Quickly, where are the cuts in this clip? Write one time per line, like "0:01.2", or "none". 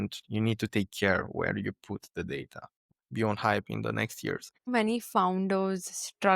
0:02.9
0:04.7